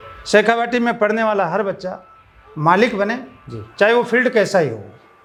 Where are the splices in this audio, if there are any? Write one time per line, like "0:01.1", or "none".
none